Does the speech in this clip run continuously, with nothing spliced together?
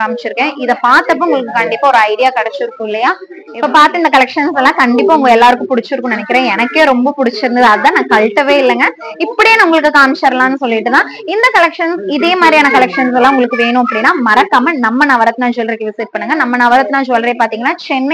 yes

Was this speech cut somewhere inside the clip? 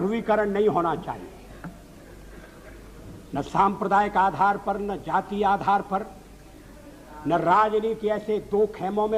no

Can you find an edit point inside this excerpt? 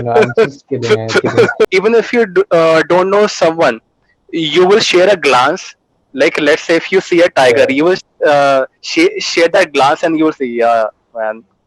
yes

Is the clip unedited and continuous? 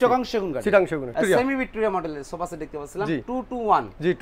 no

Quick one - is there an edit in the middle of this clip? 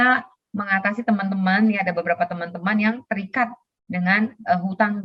no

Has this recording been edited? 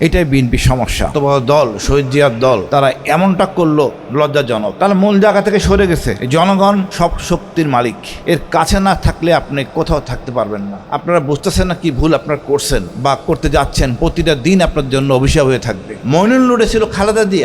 yes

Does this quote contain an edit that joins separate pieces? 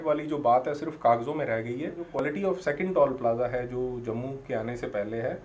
yes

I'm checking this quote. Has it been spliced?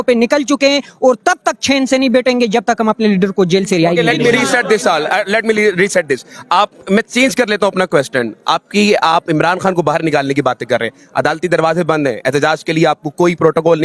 no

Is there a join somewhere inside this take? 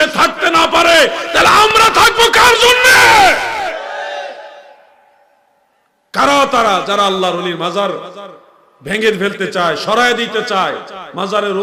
no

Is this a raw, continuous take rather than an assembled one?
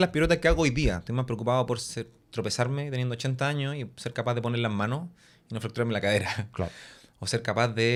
yes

